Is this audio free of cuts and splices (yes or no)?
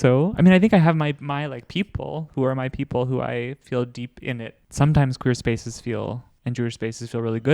no